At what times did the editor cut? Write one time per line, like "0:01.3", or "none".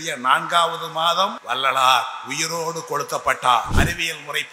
0:01.4
0:03.7